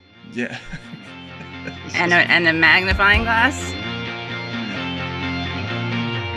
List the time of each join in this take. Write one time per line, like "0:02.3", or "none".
0:03.5